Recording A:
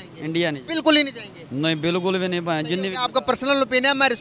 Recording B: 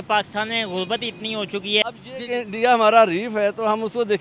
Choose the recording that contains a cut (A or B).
B